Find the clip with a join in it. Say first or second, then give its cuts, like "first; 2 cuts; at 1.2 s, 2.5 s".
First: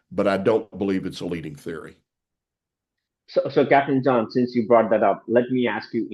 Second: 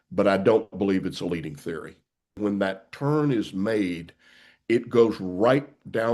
second; 1 cut; at 2.4 s